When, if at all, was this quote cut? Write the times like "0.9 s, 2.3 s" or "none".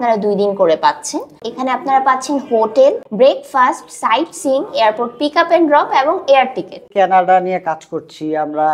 1.3 s, 3.1 s, 6.9 s